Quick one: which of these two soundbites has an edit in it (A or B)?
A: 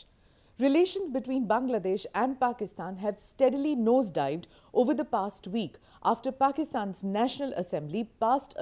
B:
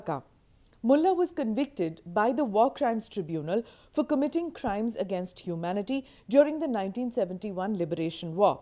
B